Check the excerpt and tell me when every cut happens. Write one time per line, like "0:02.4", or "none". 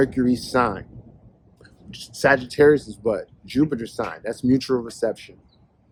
none